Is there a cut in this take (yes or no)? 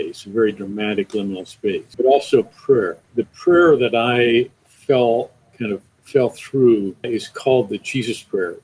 yes